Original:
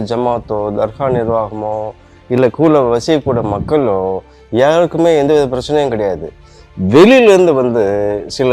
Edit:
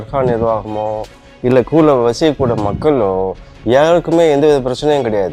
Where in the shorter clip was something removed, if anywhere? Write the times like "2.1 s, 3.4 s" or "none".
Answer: none